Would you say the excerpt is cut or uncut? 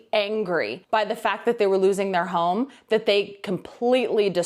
uncut